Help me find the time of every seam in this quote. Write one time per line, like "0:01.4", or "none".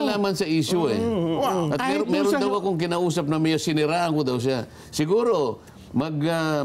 none